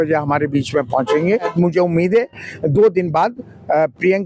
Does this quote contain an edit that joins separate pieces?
yes; 1 cut; at 1.5 s

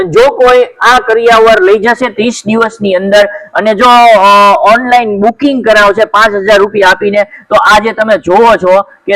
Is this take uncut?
yes; 0 cuts

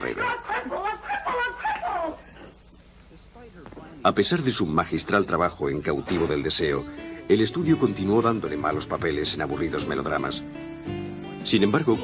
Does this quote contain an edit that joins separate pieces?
yes; 1 cut; at 4.9 s

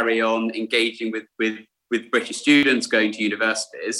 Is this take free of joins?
no; 1 cut; at 2.6 s

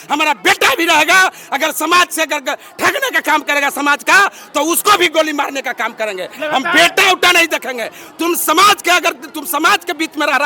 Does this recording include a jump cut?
no; 0 cuts

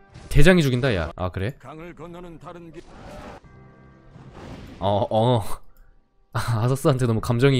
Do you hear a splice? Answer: yes; 2 cuts; at 1.1 s, 3.4 s

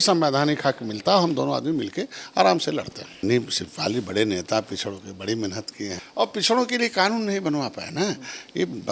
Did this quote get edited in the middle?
yes; 2 cuts; at 3.2 s, 6.0 s

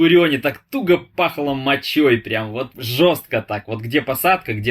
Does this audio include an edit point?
yes; 1 cut; at 2.7 s

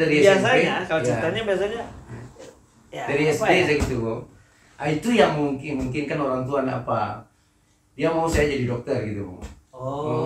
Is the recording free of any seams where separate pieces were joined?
yes; 0 cuts

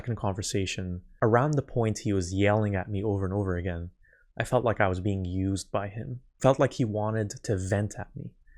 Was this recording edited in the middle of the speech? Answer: yes; 1 cut; at 1.0 s

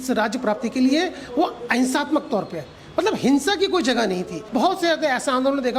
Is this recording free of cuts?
no; 1 cut; at 4.4 s

